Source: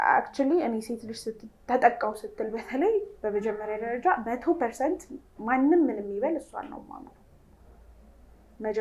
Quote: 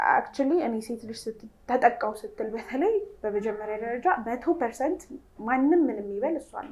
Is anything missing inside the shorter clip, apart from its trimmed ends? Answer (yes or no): no